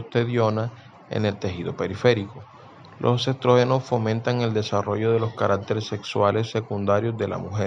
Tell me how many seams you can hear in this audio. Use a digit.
0